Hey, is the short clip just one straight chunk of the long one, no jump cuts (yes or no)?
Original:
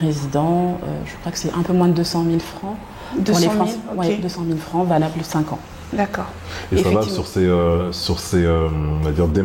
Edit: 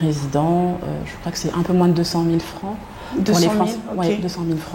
yes